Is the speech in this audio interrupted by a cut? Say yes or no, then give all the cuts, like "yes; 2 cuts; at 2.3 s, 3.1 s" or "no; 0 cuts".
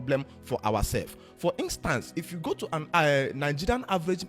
no; 0 cuts